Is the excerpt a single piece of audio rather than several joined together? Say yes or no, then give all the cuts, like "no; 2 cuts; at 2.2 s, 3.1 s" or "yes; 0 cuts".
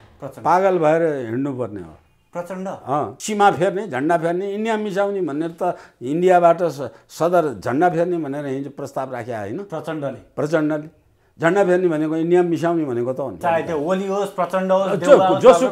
no; 2 cuts; at 3.2 s, 13.4 s